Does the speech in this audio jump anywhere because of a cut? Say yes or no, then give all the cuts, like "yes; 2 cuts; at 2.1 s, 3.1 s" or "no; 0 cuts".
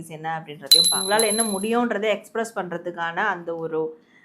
yes; 1 cut; at 0.9 s